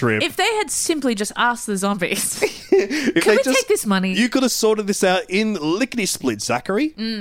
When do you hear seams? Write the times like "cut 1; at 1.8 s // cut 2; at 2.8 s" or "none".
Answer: cut 1; at 4.1 s

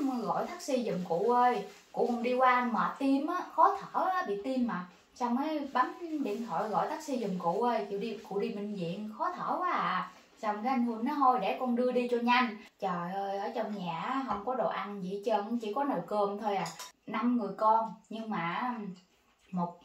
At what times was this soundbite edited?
cut 1; at 12.7 s // cut 2; at 16.8 s

